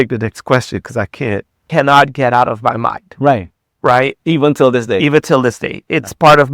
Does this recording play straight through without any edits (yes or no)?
no